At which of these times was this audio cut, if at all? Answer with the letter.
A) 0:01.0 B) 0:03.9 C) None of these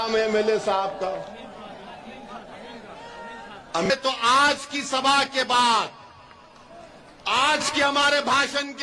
B